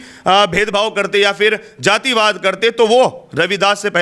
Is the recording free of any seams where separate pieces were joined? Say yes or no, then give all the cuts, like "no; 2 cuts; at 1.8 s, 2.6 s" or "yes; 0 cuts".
yes; 0 cuts